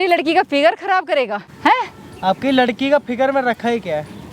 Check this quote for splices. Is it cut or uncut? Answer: cut